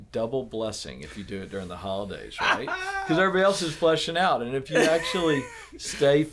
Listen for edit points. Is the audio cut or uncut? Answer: uncut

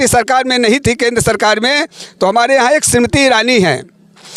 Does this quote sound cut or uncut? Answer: uncut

